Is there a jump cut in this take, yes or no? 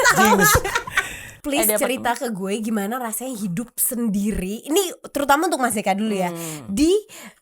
yes